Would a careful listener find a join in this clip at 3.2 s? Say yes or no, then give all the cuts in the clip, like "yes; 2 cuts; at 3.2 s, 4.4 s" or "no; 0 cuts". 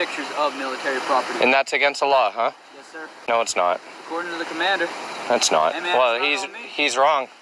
no; 0 cuts